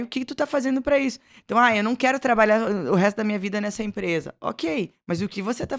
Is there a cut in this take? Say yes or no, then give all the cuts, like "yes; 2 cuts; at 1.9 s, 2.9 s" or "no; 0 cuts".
no; 0 cuts